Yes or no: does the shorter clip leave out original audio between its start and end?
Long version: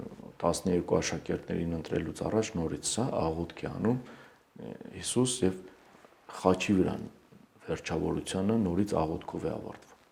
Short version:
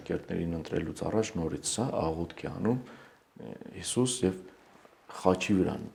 no